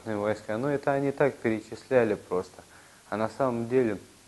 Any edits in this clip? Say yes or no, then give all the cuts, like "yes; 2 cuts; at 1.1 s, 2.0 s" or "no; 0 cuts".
no; 0 cuts